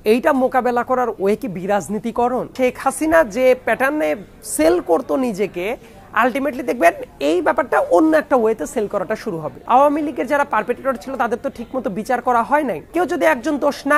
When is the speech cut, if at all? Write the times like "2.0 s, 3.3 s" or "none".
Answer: 2.5 s, 9.5 s, 12.8 s